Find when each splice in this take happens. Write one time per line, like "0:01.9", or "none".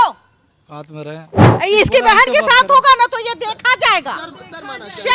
0:01.5

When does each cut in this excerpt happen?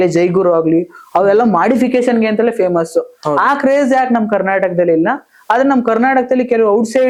none

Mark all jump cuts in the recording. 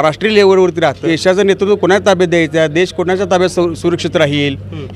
0:01.0

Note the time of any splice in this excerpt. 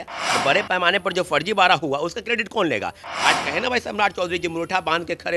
0:03.0

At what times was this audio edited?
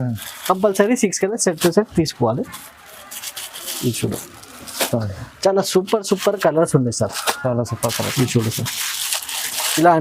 none

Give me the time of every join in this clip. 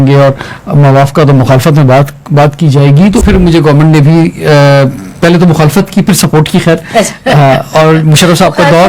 0:03.2

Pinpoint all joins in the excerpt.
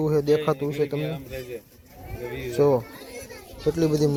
none

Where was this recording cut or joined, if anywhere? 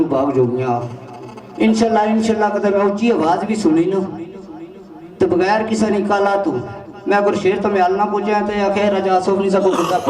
none

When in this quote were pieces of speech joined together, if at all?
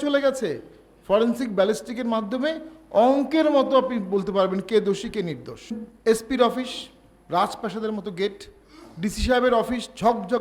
0:05.8

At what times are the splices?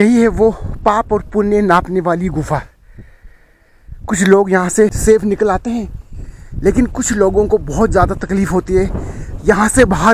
0:05.0

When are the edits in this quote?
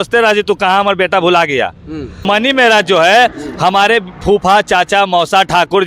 0:02.2

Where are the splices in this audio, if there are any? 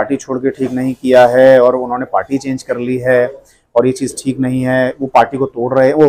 none

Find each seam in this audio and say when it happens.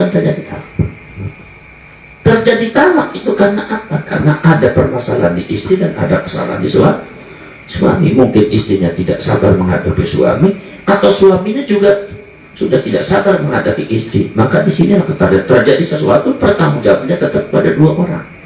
none

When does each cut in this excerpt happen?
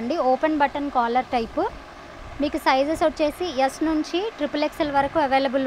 none

